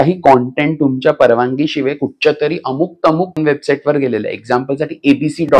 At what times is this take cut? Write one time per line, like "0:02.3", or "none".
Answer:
0:03.4